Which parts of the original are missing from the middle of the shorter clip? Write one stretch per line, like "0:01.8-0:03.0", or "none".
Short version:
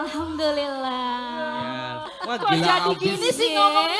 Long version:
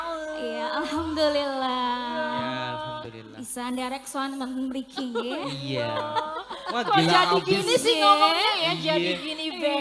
0:02.9-0:06.5